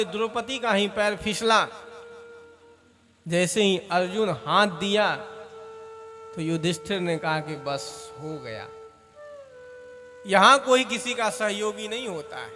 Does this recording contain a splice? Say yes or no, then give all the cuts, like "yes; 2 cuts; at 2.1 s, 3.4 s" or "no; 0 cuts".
no; 0 cuts